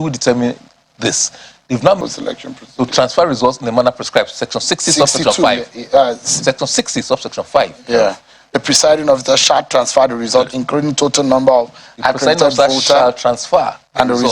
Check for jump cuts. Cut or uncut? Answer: cut